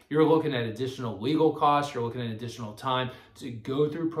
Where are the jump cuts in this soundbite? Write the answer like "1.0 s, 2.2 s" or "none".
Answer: none